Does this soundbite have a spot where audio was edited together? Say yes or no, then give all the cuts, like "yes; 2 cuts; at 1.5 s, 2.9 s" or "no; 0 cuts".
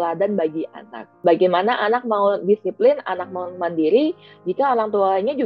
yes; 1 cut; at 1.0 s